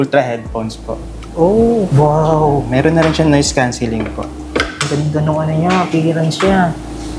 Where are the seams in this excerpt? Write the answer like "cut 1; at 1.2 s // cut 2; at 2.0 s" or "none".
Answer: cut 1; at 1.9 s